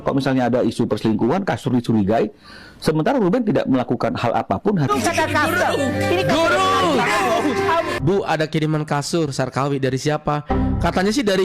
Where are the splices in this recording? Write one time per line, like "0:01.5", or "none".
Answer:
0:04.9
0:07.9